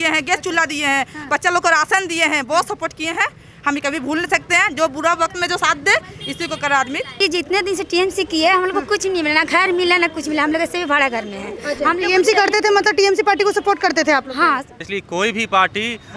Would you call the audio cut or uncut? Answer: cut